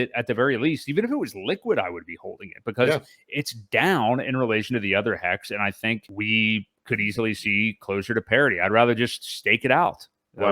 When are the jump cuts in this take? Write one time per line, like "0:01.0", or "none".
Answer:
0:06.1